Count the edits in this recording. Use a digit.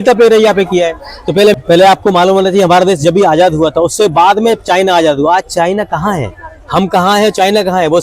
1